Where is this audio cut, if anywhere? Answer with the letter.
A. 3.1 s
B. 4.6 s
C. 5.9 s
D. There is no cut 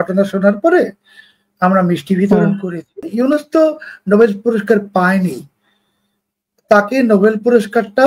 A